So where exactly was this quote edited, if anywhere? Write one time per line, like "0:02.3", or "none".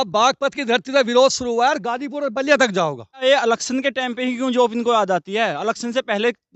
0:03.2

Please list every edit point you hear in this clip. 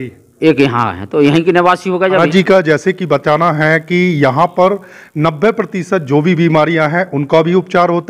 0:02.2

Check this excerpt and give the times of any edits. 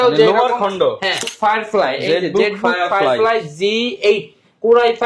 0:01.3

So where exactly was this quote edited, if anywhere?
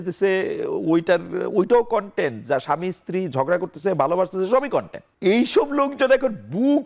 0:05.0

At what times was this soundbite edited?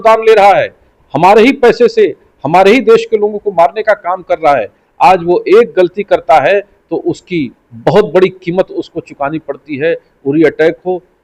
none

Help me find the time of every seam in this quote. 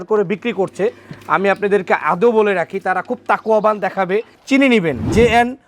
0:04.3

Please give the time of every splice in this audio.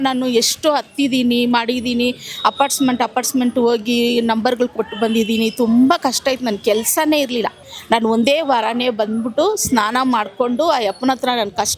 0:07.7

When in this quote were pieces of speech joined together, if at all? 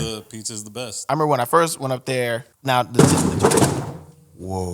0:01.0
0:02.5

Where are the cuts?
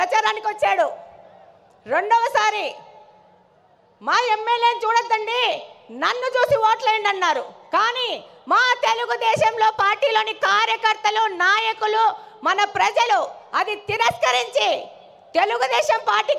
none

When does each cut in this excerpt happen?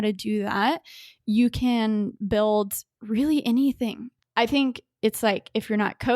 0:04.1

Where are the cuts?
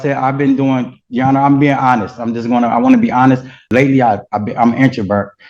0:03.6

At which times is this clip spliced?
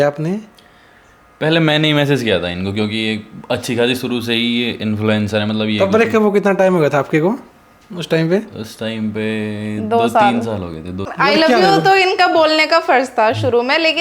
0:11.1

